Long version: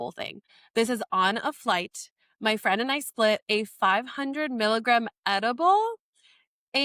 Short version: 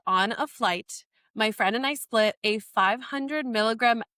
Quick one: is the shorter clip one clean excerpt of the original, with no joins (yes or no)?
yes